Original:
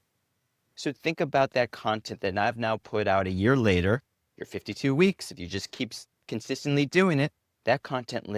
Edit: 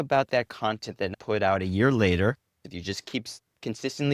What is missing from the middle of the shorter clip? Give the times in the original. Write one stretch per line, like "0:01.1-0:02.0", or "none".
0:02.4-0:02.8
0:04.3-0:05.3